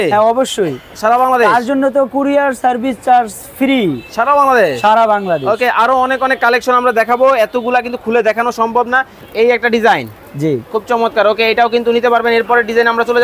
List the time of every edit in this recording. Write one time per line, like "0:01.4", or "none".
0:09.2